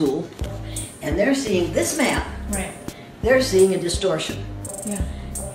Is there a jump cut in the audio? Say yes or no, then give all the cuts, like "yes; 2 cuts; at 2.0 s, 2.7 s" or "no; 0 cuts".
no; 0 cuts